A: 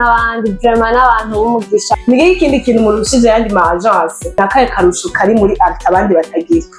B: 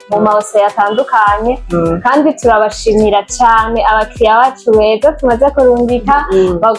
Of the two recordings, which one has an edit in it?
A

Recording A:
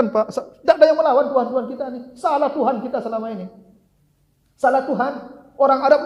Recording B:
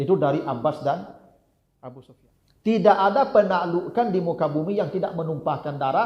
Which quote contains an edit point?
B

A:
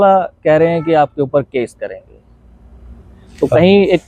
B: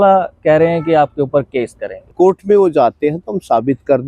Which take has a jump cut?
B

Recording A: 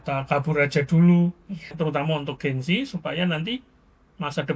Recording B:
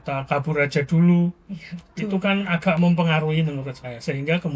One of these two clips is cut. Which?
A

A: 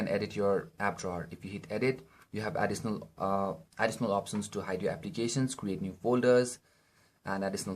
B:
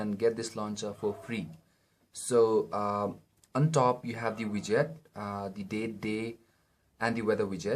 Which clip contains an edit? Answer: A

